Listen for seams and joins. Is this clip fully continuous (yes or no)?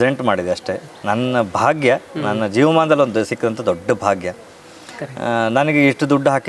yes